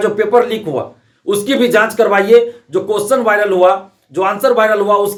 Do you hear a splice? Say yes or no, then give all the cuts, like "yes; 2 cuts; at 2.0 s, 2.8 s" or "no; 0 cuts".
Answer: no; 0 cuts